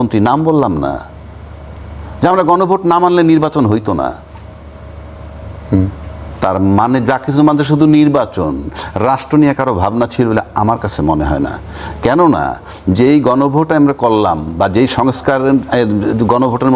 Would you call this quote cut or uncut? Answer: uncut